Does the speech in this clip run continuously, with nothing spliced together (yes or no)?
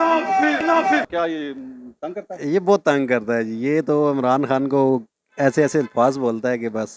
no